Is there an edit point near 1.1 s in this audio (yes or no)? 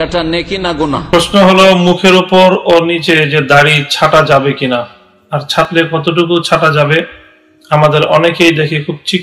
yes